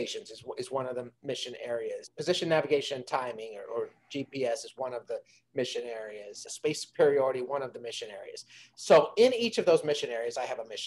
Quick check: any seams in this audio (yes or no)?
yes